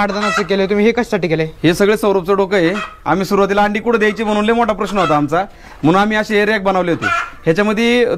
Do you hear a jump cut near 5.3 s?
no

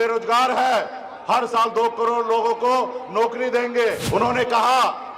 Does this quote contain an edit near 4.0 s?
yes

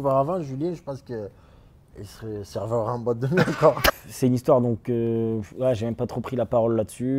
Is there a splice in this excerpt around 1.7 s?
no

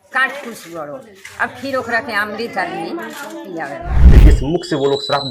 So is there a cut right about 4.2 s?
yes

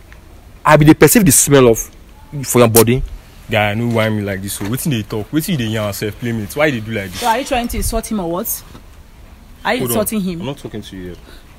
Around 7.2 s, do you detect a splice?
no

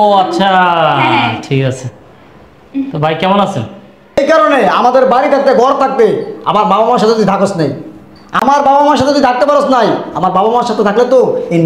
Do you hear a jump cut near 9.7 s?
no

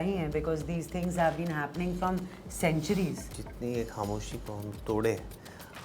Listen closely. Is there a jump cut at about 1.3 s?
no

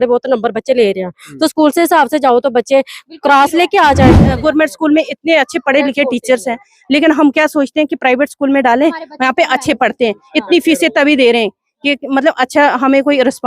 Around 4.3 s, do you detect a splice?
yes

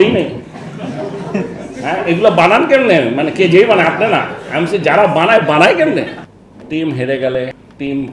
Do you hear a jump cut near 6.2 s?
yes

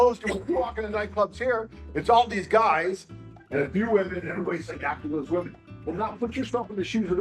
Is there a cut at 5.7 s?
no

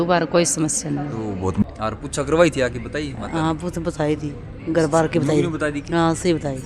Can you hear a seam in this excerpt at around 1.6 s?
yes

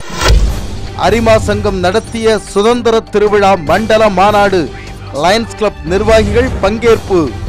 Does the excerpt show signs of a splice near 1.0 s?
yes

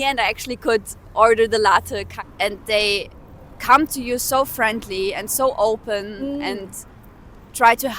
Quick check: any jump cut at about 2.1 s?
yes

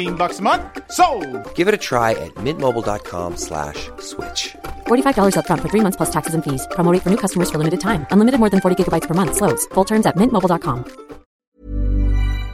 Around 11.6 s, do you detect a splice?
yes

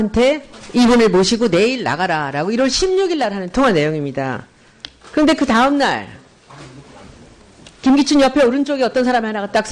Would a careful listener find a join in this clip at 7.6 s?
yes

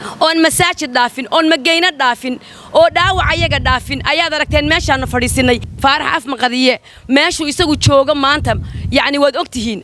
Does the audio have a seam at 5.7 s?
yes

